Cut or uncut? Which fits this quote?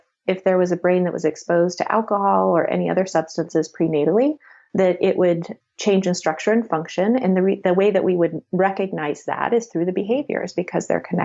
uncut